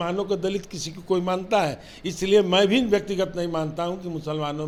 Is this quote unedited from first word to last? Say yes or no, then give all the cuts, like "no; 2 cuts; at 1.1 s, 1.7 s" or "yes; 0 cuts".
yes; 0 cuts